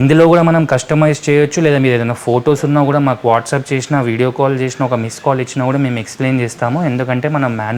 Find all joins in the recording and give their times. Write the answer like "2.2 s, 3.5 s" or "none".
none